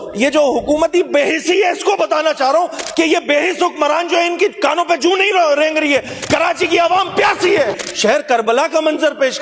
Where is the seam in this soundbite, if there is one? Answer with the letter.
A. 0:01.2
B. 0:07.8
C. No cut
B